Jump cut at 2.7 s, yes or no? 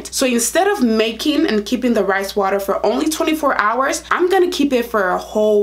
no